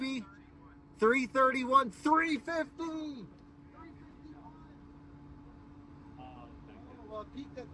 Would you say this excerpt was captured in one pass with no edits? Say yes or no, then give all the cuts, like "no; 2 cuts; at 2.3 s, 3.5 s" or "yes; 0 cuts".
yes; 0 cuts